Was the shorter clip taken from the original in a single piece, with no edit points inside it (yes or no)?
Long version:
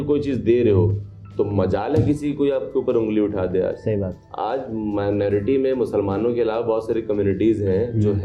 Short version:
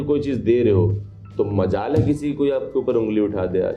yes